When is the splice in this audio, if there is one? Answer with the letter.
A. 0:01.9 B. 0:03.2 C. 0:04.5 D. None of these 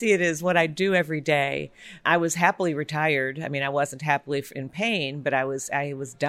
A